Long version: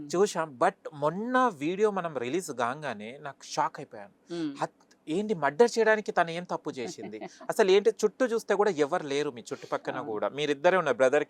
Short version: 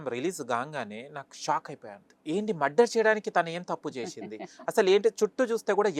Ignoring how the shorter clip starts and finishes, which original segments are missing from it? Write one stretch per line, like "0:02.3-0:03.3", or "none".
0:04.1-0:04.9

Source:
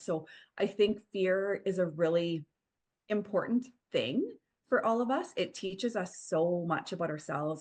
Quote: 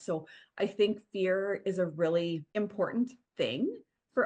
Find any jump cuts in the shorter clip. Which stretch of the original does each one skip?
0:02.4-0:03.0

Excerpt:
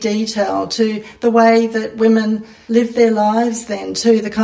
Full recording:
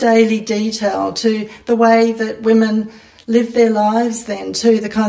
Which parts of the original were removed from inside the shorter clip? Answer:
0:03.0-0:03.1

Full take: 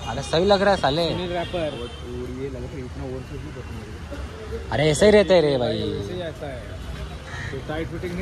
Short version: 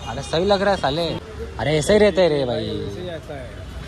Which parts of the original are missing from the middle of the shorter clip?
0:01.2-0:04.3

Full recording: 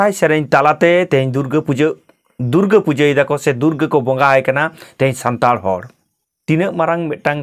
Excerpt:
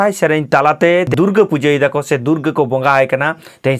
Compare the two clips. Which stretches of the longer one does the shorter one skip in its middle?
0:01.1-0:02.4

